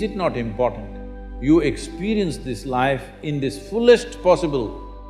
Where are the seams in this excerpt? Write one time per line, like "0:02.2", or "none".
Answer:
none